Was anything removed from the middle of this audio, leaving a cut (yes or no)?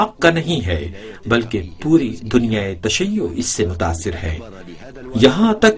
yes